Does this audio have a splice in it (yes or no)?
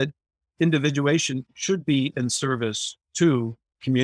yes